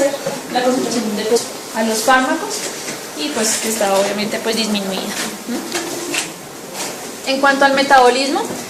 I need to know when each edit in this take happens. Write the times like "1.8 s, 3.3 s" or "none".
none